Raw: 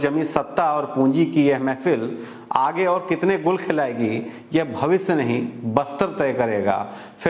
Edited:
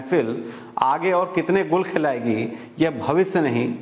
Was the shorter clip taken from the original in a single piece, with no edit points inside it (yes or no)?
yes